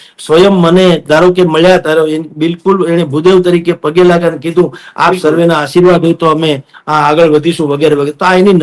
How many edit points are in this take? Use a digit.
0